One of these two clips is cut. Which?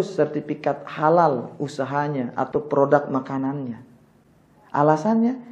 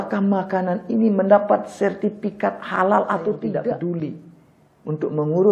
second; 1 cut; at 3.5 s

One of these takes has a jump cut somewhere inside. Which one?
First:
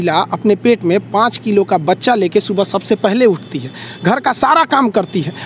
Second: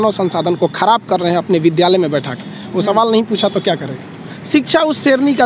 second; 1 cut; at 4.3 s

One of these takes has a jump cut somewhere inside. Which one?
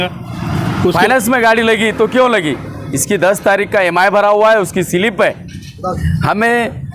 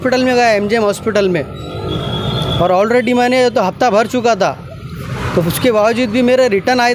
first; 2 cuts; at 0.9 s, 6.0 s

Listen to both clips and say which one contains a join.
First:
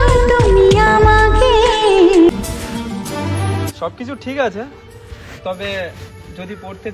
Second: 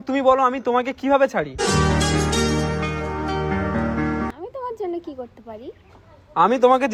first; 1 cut; at 2.3 s

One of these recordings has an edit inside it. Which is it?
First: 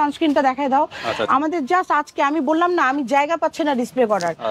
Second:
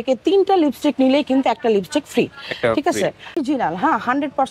second; 1 cut; at 3.3 s

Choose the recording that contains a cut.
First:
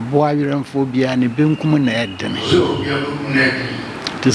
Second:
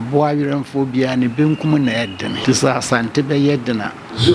second; 1 cut; at 2.4 s

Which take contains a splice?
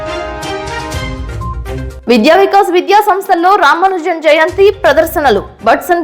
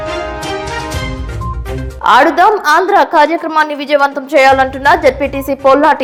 first; 1 cut; at 1.9 s

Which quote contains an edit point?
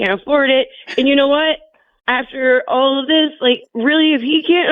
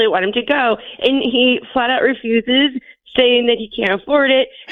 first; 1 cut; at 3.7 s

